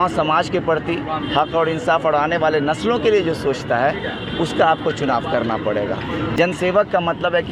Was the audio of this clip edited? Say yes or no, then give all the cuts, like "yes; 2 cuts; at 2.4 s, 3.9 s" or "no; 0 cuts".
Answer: yes; 1 cut; at 6.4 s